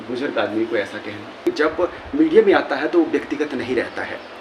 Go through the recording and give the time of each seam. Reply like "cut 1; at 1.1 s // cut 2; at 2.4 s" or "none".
cut 1; at 1.4 s